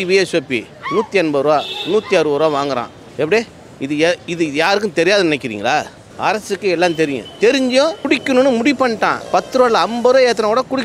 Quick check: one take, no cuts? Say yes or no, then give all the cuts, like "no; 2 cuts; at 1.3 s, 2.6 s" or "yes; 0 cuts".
yes; 0 cuts